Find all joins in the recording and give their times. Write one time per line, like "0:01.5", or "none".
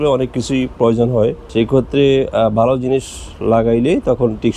0:01.4